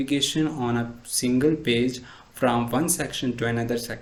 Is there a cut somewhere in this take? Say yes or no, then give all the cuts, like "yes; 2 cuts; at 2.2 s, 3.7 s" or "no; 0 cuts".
no; 0 cuts